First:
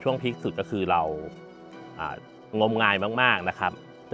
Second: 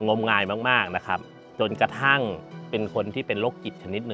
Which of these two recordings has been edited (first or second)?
second